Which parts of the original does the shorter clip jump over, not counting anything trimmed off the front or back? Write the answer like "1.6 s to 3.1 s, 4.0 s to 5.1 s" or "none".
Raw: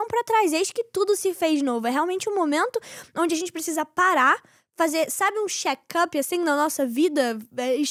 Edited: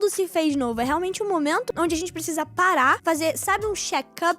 2.8 s to 3.1 s, 4.4 s to 4.7 s